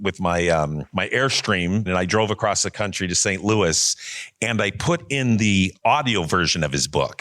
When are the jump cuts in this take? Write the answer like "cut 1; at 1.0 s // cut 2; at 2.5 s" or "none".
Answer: cut 1; at 0.8 s // cut 2; at 1.9 s // cut 3; at 5.7 s